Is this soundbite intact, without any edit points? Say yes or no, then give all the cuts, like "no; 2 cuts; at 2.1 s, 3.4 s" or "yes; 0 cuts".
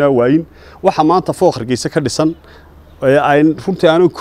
yes; 0 cuts